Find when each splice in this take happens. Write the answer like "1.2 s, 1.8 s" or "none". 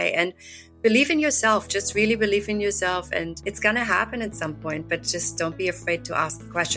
none

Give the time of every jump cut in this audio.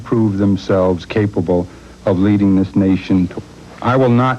3.3 s

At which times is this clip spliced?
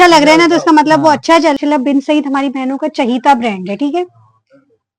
1.6 s

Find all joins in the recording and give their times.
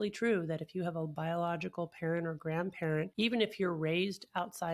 3.1 s

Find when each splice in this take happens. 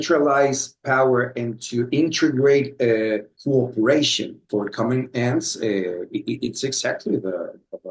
3.3 s, 4.4 s

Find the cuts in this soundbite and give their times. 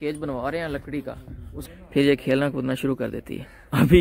1.6 s

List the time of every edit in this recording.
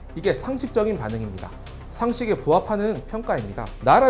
none

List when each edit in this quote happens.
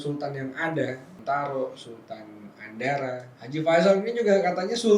1.1 s, 3.3 s

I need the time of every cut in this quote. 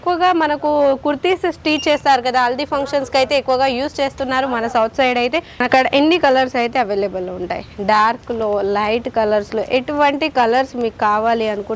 5.5 s

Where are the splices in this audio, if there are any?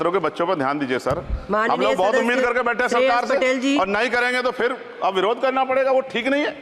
none

